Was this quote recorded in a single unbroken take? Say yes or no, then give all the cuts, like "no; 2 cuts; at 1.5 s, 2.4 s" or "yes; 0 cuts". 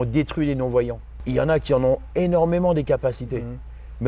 no; 1 cut; at 1.1 s